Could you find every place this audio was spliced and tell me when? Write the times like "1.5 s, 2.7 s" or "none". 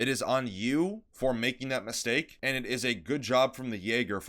1.1 s, 2.3 s